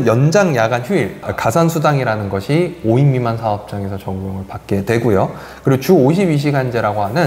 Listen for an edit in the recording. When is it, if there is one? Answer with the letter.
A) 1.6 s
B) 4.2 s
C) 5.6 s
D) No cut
D